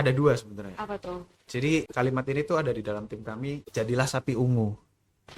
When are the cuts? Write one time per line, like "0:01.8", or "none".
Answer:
0:01.9
0:03.6